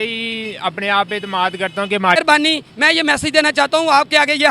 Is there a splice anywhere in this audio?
yes; 1 cut; at 2.2 s

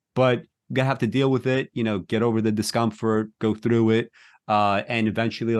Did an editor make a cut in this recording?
no; 0 cuts

